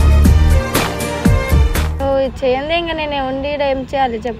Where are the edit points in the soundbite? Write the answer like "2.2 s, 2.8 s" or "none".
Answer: 1.9 s